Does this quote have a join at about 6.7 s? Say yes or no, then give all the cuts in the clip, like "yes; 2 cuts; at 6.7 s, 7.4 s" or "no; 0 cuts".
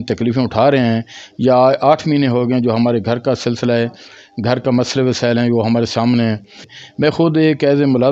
yes; 1 cut; at 6.7 s